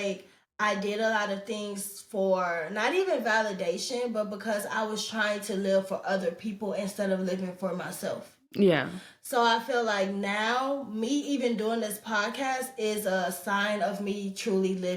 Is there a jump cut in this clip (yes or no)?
no